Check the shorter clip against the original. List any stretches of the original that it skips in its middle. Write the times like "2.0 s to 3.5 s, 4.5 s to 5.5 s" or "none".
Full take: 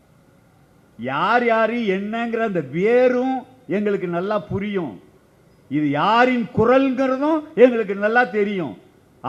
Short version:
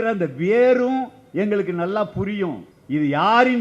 5.0 s to 5.5 s

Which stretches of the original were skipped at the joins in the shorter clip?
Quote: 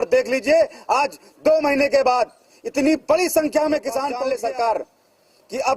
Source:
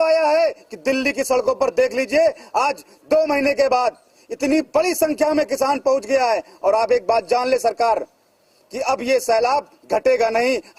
5.9 s to 7.4 s

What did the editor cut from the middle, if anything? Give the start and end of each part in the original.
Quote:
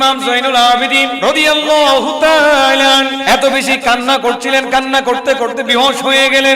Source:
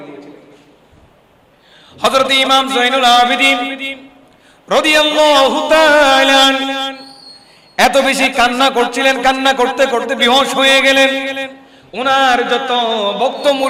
3.6 s to 4.6 s, 6.7 s to 7.7 s

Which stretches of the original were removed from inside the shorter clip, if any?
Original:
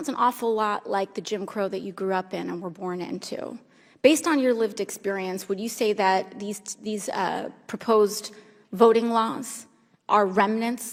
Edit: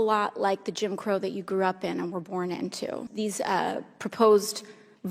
3.5 s to 6.7 s

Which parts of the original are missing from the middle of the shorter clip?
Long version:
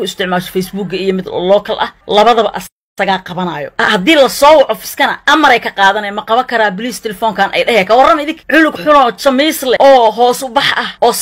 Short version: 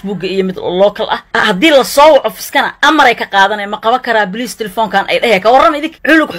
2.0 s to 3.7 s

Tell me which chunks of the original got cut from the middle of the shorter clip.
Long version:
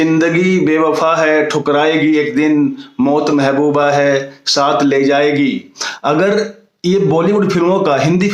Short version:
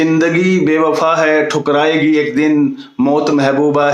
none

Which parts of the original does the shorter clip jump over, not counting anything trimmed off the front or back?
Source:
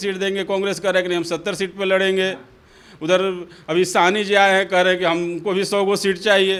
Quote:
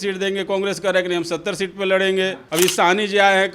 2.4 s to 3.6 s

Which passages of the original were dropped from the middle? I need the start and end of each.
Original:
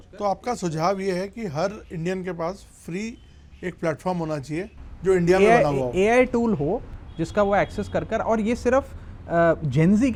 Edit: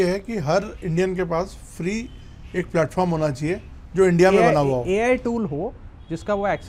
none

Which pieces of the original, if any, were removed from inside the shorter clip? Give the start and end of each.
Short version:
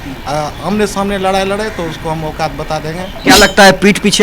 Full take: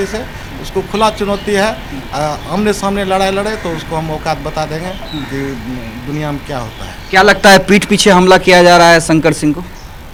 5.0 s to 7.0 s

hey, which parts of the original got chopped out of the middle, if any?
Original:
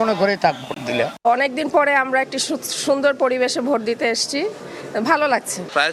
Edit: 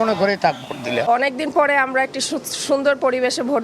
0.9 s to 1.1 s

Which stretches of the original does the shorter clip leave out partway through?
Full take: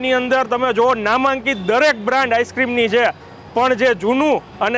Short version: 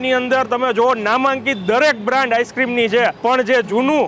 3.2 s to 3.5 s

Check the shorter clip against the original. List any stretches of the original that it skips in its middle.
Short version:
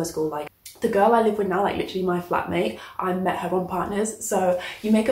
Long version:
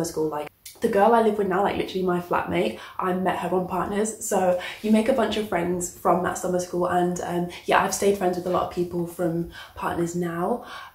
none

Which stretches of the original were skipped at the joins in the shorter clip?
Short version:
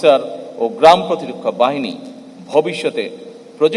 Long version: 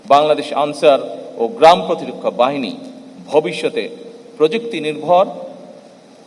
none

